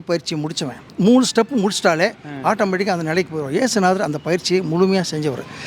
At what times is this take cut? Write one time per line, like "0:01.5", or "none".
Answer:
0:00.9